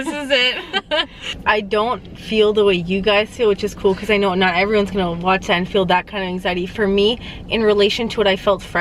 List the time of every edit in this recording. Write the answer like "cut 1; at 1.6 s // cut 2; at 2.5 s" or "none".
cut 1; at 1.2 s